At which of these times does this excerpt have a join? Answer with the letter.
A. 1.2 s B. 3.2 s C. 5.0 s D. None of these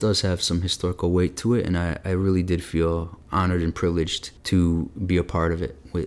D